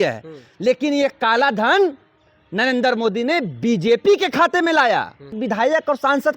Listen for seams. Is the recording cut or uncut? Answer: cut